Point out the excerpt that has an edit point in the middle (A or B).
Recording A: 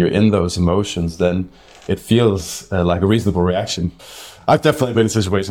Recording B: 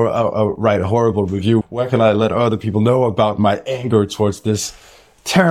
B